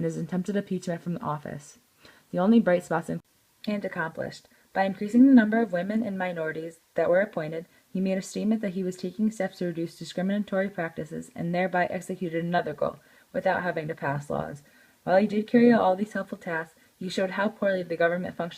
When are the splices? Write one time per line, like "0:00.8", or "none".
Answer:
0:03.2

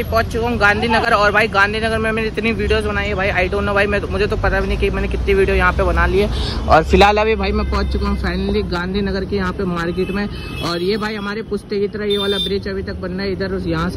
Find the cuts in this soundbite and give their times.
none

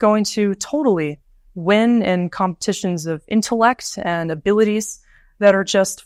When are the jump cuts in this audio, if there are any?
none

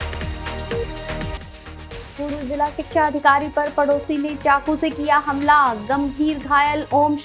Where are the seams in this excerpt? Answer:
0:01.3

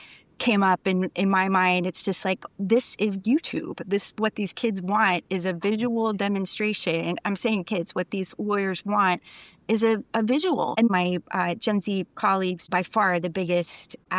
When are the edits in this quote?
0:10.9
0:12.6

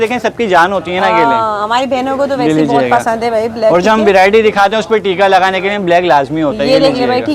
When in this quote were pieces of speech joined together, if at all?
none

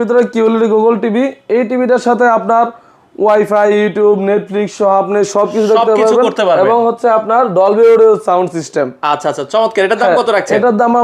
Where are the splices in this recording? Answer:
none

